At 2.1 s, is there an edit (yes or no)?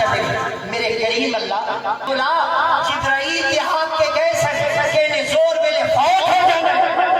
yes